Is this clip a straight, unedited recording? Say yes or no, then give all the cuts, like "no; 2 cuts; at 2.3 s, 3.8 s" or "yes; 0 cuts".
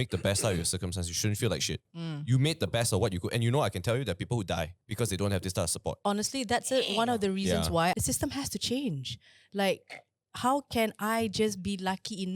no; 4 cuts; at 1.9 s, 4.8 s, 6.0 s, 7.9 s